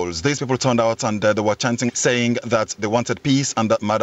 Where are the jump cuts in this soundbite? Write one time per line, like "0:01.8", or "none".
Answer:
0:01.9
0:02.8